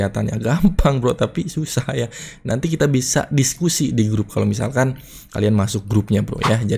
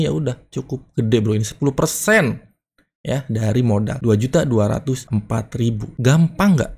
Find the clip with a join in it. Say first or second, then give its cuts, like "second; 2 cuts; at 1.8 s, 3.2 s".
second; 2 cuts; at 3.9 s, 5.4 s